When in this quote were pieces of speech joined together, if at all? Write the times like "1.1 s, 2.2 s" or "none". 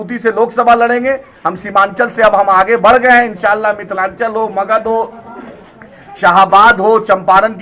none